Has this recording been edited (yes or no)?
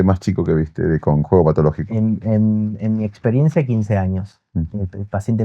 no